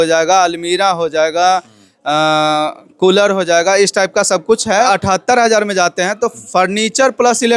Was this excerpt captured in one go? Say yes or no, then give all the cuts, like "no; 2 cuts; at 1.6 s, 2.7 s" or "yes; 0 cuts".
no; 1 cut; at 4.9 s